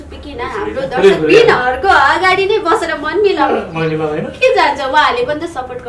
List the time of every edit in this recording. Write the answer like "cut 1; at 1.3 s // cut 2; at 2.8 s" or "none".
none